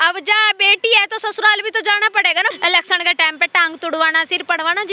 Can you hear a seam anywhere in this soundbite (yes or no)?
yes